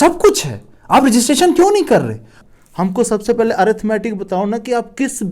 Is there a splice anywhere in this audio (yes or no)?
yes